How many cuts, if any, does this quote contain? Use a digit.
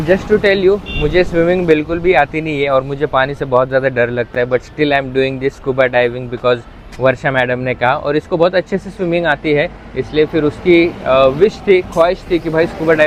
0